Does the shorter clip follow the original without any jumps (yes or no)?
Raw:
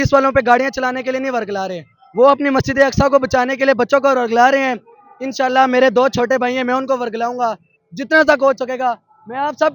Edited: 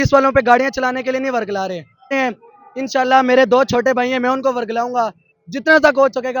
no